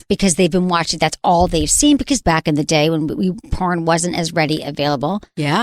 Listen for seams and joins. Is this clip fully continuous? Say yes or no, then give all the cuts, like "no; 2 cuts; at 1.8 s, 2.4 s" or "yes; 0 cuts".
no; 1 cut; at 2.2 s